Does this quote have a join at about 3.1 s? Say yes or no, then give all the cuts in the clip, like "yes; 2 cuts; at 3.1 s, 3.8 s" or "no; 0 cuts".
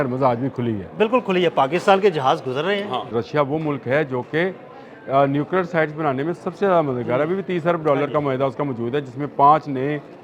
yes; 1 cut; at 3.1 s